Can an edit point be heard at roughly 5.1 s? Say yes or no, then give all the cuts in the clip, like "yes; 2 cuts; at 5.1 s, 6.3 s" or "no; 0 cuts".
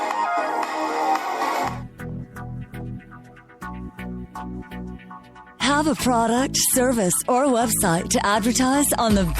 no; 1 cut; at 1.7 s